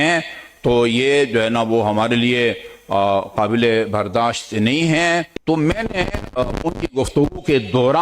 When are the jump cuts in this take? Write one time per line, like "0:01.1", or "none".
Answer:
0:05.3